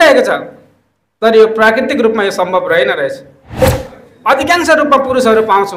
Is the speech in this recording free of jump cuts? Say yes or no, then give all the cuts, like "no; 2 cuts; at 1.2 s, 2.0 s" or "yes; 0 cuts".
no; 1 cut; at 3.6 s